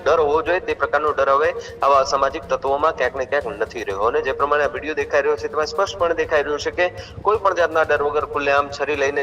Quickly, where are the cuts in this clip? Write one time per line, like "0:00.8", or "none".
none

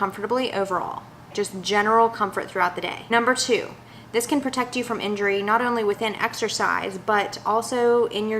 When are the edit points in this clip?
0:01.3
0:03.1

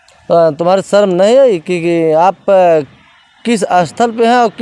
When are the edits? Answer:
none

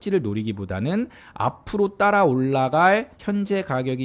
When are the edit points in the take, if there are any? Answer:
0:03.1

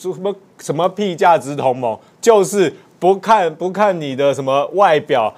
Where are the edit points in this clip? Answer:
none

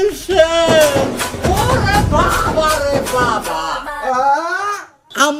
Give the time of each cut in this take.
0:04.5

